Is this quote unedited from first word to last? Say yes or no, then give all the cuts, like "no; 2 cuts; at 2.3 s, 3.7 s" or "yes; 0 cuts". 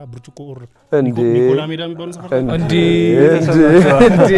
yes; 0 cuts